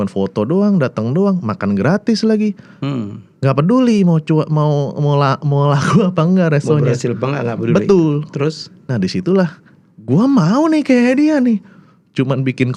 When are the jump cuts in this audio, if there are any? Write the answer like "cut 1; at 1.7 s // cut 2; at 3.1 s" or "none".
none